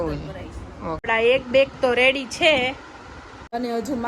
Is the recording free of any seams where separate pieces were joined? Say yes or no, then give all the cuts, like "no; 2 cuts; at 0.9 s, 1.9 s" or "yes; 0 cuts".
no; 1 cut; at 1.0 s